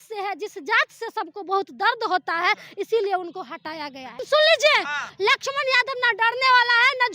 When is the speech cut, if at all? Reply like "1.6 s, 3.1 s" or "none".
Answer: 4.2 s, 5.1 s